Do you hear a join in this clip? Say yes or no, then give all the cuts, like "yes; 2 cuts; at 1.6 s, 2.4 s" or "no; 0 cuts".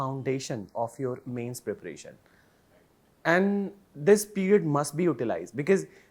no; 0 cuts